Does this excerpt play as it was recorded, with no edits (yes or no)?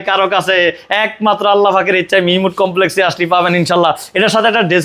yes